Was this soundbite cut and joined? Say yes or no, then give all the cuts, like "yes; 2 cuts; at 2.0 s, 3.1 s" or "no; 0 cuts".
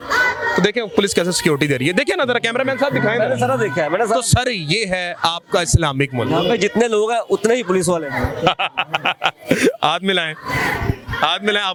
no; 0 cuts